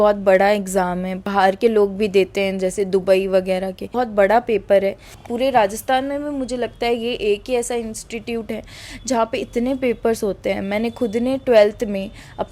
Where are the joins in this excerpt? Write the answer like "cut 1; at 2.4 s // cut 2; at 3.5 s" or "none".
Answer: cut 1; at 1.2 s // cut 2; at 3.9 s // cut 3; at 5.1 s